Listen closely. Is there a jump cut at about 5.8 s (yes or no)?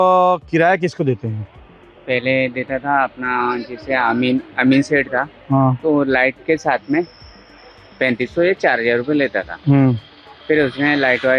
no